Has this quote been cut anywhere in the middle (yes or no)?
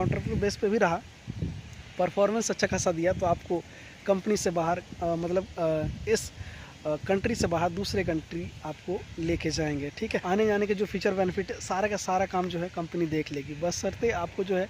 no